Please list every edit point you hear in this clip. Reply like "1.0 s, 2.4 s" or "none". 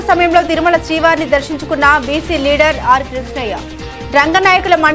none